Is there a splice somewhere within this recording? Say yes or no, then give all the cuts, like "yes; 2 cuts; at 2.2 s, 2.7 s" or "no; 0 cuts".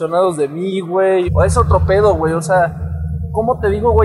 yes; 1 cut; at 1.3 s